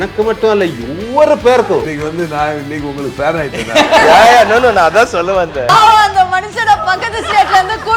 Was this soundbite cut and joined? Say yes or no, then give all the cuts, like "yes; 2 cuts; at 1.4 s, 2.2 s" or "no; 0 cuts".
yes; 2 cuts; at 1.9 s, 5.7 s